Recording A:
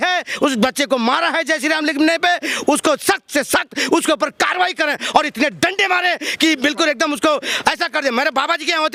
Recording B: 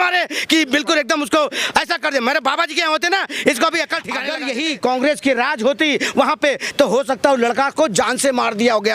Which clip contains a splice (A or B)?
B